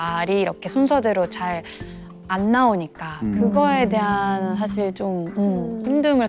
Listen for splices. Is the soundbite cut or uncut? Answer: uncut